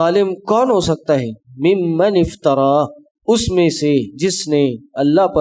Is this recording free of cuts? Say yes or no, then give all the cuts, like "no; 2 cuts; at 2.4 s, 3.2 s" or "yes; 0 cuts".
yes; 0 cuts